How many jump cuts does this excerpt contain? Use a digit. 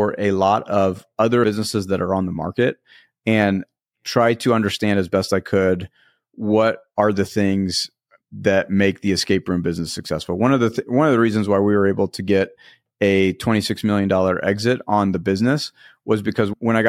1